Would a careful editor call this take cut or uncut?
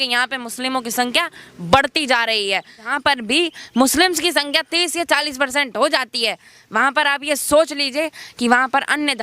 cut